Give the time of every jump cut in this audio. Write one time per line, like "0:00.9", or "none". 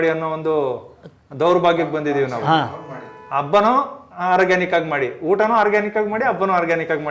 none